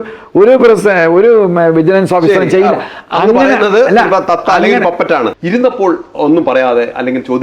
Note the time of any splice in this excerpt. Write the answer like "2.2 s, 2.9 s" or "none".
5.4 s